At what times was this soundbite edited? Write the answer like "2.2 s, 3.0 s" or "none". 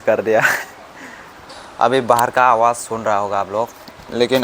1.4 s

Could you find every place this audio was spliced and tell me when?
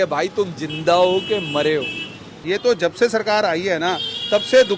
2.3 s

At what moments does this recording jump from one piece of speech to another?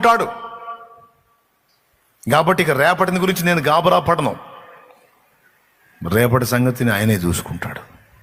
none

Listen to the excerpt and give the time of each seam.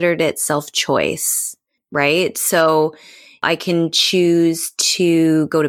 1.8 s, 3.4 s

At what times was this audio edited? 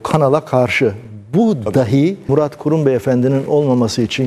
2.2 s

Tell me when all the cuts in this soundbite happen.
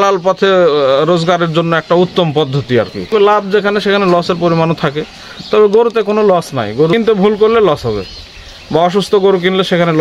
3.1 s, 6.9 s

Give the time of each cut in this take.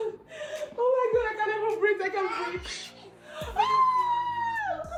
none

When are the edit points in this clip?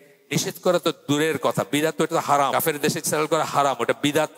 2.5 s

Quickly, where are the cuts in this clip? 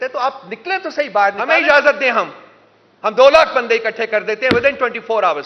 1.4 s

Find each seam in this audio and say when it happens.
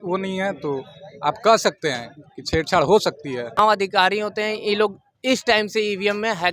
3.6 s

